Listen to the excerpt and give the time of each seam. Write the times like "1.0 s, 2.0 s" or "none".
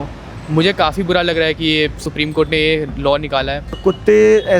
2.0 s, 3.8 s